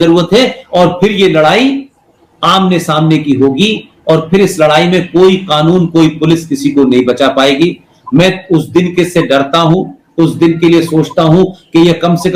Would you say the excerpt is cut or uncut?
uncut